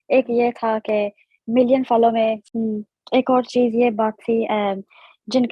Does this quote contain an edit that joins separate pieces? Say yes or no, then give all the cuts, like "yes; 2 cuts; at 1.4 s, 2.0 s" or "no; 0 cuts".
yes; 1 cut; at 2.5 s